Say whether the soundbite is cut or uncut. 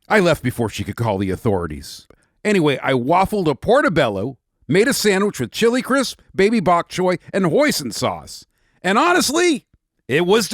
cut